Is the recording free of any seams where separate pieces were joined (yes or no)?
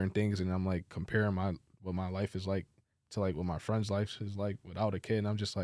yes